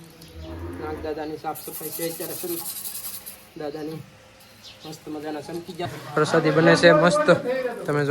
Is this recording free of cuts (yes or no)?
no